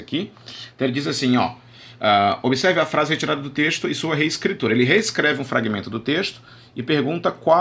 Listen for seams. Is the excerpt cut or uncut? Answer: uncut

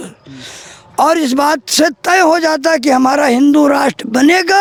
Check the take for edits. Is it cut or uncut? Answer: uncut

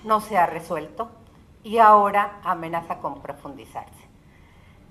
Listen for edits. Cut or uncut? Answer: uncut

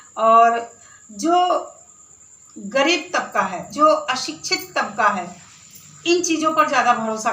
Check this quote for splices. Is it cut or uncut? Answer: cut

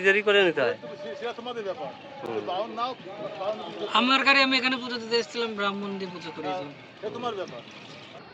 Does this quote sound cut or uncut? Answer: uncut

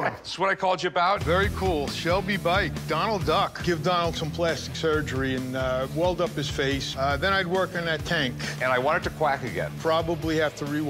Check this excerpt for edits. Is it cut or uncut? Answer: uncut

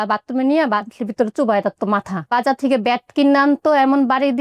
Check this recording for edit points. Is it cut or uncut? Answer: cut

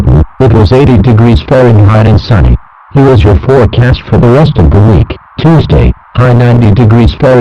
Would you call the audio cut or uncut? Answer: cut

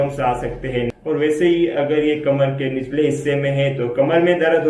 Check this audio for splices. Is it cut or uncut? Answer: cut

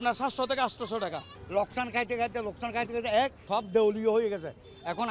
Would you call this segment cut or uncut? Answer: cut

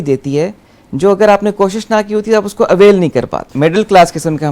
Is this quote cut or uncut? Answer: cut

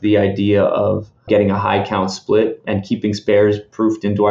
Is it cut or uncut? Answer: cut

